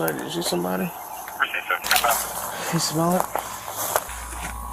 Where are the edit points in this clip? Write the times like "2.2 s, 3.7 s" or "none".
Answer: 2.2 s